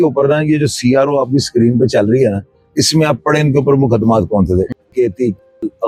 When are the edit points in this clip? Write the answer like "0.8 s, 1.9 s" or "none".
none

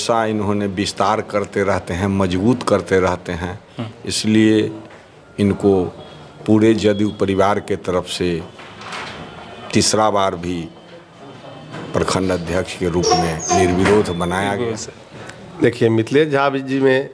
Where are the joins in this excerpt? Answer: 14.6 s

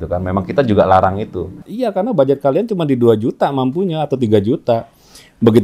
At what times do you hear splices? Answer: 1.7 s

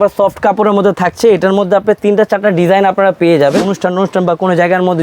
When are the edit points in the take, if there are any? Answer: 3.7 s

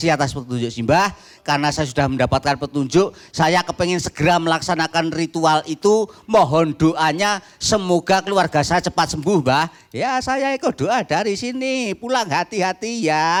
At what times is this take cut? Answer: none

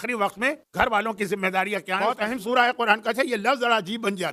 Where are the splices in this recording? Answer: 2.0 s

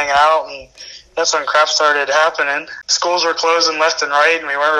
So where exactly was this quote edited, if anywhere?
2.8 s

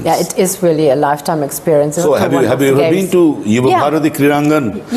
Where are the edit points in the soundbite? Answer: 2.0 s

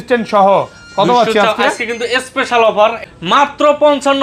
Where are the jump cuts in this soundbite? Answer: 3.0 s

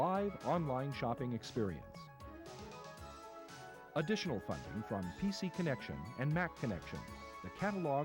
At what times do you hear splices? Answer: none

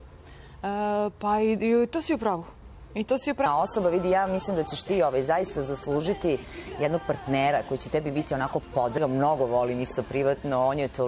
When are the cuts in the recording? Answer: 3.5 s, 9.0 s

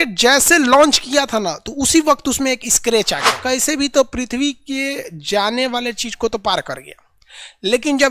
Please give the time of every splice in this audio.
3.3 s

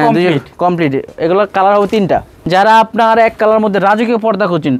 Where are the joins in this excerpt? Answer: 2.3 s

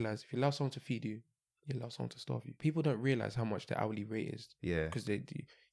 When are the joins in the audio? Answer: 2.6 s

